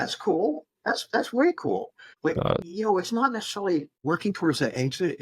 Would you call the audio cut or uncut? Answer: cut